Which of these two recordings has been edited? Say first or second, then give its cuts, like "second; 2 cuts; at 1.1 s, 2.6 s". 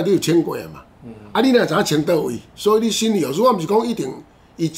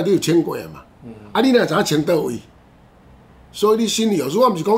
first; 1 cut; at 2.4 s